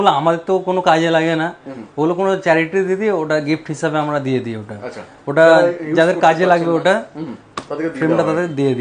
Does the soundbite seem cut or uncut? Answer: uncut